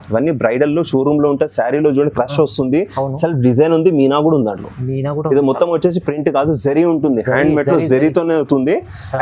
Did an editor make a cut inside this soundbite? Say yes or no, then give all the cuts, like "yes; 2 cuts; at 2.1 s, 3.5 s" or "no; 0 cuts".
no; 0 cuts